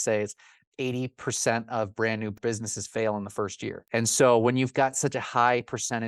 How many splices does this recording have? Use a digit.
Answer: 2